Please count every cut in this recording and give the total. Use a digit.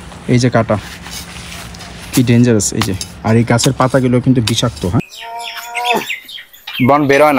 1